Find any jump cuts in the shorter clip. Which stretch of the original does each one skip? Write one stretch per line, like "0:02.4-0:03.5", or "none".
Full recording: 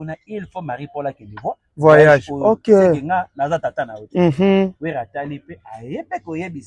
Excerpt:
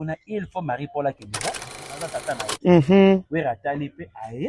0:01.8-0:03.2

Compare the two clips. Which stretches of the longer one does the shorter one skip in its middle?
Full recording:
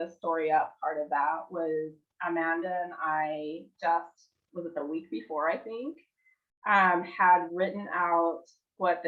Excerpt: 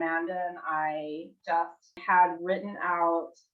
0:04.3-0:07.1

